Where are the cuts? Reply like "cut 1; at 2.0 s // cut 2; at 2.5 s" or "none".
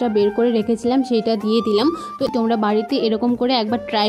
cut 1; at 2.3 s